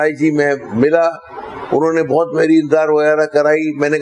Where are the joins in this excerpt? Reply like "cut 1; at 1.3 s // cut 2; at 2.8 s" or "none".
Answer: none